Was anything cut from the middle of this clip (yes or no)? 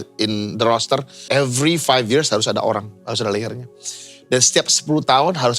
yes